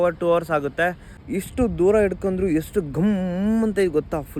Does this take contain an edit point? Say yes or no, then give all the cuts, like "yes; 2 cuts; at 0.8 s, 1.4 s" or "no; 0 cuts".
yes; 1 cut; at 1.1 s